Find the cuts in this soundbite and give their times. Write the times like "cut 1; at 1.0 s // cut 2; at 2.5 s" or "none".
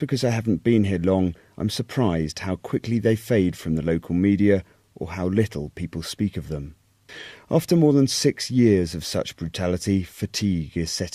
cut 1; at 3.2 s